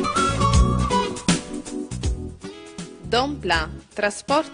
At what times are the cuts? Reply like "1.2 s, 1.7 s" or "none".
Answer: 3.0 s

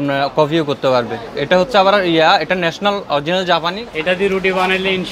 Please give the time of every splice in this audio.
3.9 s

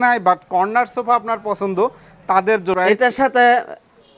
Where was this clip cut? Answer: 2.8 s

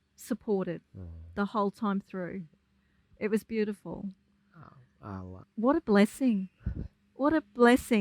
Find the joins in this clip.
5.4 s

